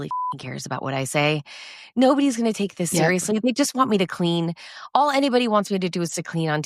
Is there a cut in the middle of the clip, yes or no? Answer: no